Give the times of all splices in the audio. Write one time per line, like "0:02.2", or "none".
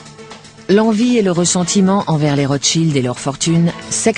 0:02.8